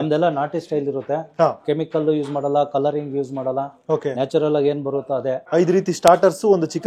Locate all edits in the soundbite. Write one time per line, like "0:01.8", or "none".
0:05.4